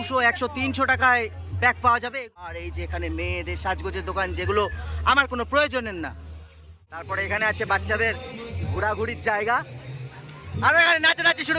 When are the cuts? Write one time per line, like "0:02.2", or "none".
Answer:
0:02.4
0:07.0